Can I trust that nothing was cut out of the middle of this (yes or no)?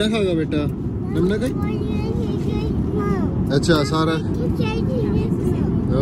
yes